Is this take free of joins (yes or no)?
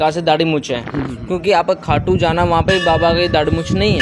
yes